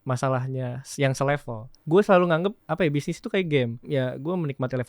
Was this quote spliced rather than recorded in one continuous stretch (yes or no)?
yes